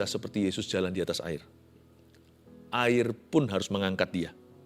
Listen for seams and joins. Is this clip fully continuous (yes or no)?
yes